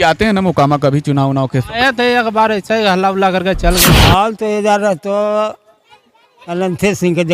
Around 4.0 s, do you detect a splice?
yes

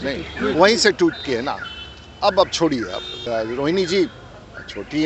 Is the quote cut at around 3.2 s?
yes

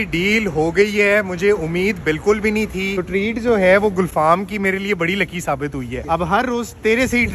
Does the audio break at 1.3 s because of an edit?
yes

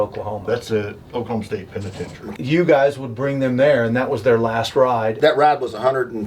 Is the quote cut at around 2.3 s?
yes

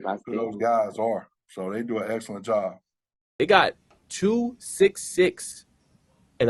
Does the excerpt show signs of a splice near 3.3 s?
yes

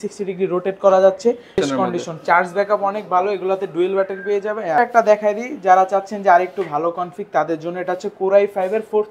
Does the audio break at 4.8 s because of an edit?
yes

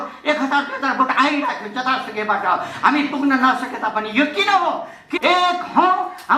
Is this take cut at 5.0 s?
yes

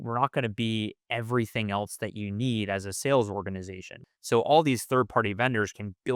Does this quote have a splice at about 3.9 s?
yes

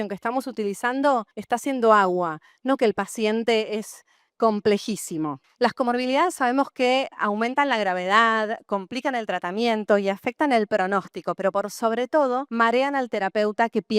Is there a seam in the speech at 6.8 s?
no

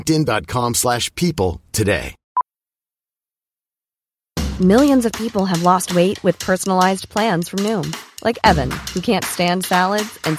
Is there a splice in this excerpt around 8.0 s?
no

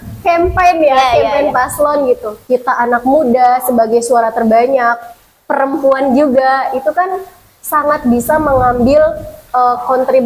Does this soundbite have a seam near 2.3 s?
yes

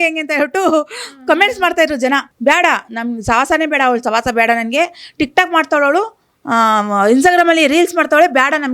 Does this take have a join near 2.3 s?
yes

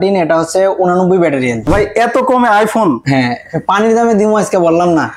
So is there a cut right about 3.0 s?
yes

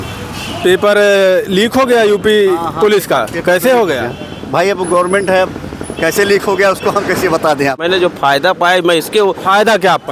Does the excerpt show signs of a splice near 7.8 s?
yes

